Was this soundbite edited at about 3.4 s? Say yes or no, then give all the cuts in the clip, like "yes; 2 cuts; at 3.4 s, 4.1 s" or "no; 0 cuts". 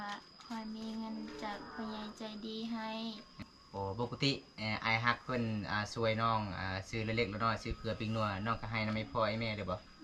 yes; 1 cut; at 3.4 s